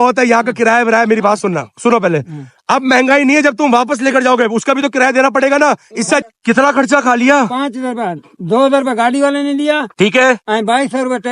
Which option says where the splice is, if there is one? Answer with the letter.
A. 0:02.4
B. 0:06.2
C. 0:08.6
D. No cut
B